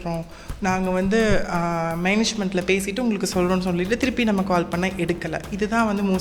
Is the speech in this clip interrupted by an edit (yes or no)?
no